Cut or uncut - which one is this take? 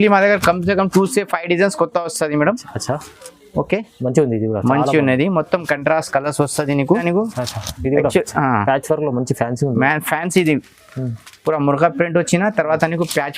cut